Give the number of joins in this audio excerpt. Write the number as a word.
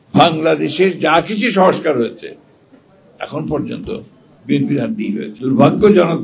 one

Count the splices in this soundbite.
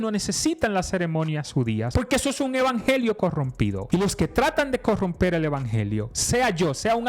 two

